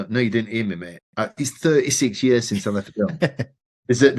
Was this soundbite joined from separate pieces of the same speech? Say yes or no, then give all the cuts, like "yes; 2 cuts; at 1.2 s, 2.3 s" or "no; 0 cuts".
no; 0 cuts